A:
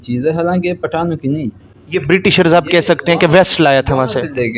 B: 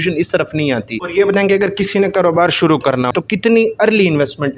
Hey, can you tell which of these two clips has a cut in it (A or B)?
B